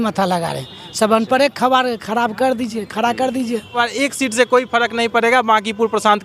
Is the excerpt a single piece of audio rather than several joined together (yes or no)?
no